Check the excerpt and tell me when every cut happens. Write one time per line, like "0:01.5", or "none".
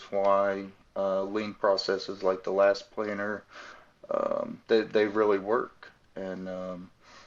none